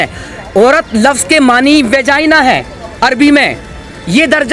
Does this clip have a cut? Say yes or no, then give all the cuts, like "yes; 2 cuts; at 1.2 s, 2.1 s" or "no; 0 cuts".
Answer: no; 0 cuts